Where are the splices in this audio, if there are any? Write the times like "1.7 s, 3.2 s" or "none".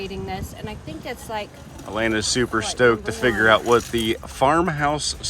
1.7 s